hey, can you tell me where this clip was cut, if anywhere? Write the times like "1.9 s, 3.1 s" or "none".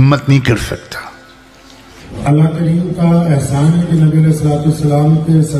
2.1 s